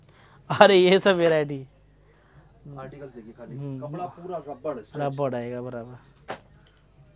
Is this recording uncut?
yes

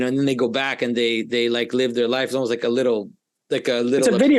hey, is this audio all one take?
yes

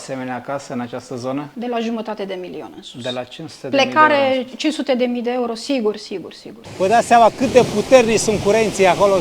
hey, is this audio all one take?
no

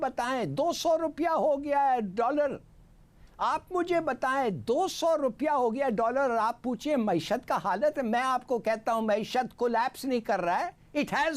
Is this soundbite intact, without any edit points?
yes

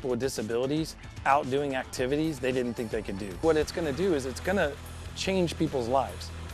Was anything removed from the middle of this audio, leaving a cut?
yes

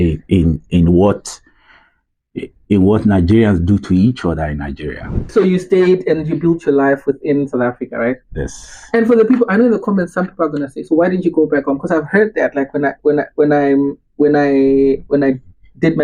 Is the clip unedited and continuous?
no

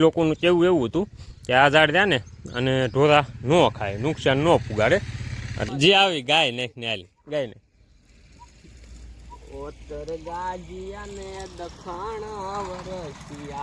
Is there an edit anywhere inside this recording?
yes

